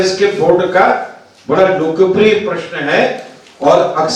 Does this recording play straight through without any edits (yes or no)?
yes